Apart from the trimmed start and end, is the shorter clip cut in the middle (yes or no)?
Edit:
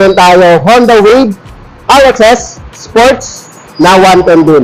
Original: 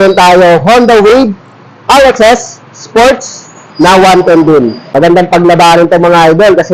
no